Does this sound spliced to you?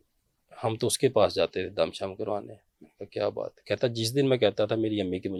no; 0 cuts

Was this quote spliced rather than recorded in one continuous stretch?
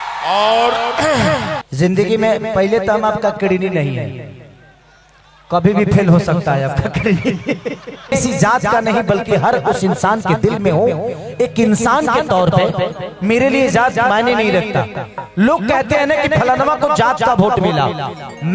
yes; 2 cuts; at 1.6 s, 8.1 s

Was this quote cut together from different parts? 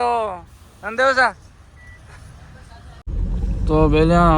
yes; 1 cut; at 3.1 s

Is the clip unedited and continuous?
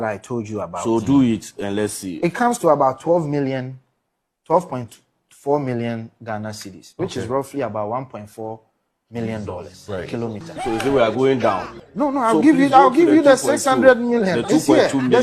yes; 0 cuts

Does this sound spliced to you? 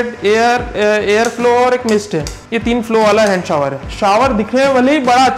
yes; 1 cut; at 3.9 s

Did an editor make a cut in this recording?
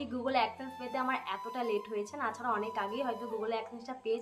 no; 0 cuts

